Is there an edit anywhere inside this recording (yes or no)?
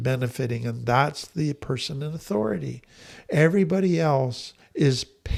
no